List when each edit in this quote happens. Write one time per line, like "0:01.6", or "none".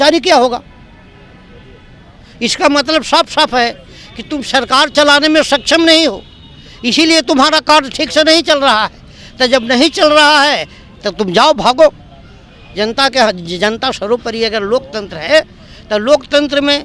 none